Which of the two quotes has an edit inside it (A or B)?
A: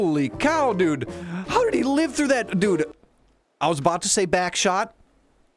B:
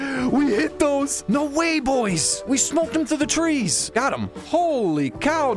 B